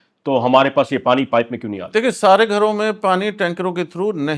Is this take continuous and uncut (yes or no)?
yes